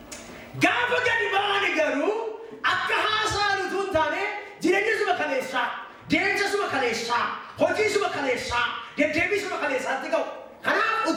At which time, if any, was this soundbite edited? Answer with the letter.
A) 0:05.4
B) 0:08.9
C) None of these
C